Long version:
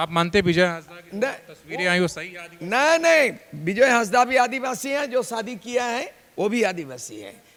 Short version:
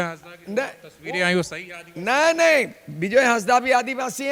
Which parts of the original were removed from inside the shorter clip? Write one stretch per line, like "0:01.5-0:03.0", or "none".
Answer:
none